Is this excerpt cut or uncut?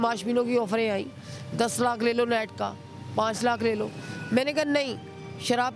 uncut